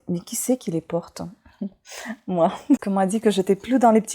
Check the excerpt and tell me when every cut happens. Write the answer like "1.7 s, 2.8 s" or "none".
2.8 s